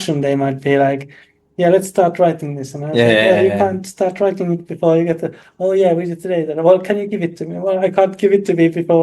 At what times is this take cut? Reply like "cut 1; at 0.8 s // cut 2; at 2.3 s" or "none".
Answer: none